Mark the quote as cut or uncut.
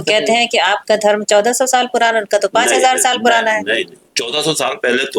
cut